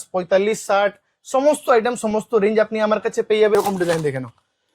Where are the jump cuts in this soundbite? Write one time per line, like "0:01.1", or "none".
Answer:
0:03.5

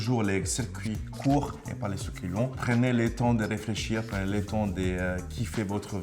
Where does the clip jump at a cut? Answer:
none

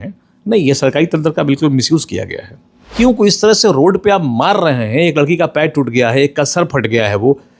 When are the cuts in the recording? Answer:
0:02.9

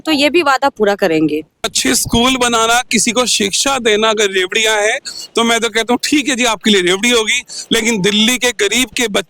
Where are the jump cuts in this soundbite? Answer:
0:01.7

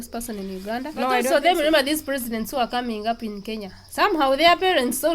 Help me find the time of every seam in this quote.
0:01.2

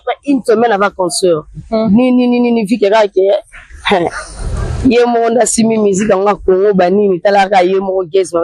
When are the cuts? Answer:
none

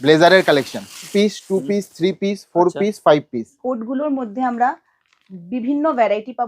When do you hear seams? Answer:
0:01.1
0:03.6

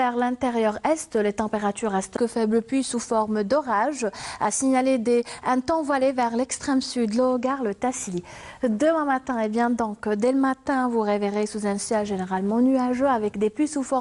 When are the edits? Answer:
none

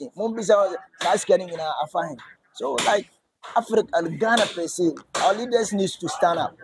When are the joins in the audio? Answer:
none

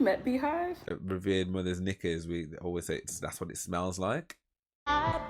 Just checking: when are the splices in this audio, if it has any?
0:01.0

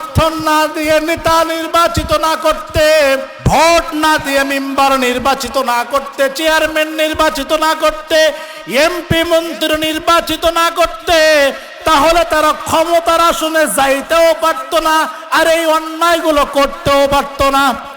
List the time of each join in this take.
0:03.3

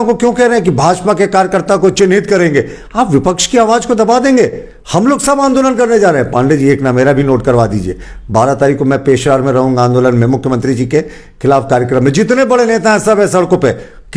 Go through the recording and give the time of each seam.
none

